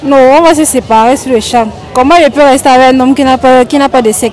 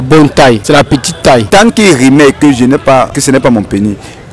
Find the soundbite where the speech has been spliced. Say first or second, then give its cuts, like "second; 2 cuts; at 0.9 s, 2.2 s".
second; 2 cuts; at 1.1 s, 3.1 s